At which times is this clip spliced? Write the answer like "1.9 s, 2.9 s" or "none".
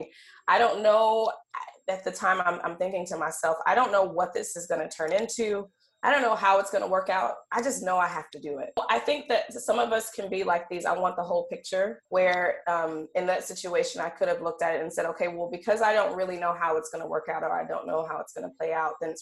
8.8 s, 12.0 s

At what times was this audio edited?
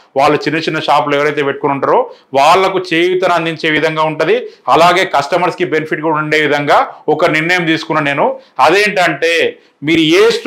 none

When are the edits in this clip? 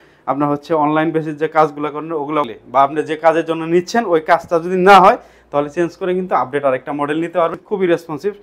2.5 s, 7.6 s

